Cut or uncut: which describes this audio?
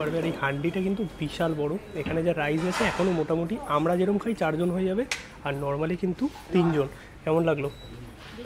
uncut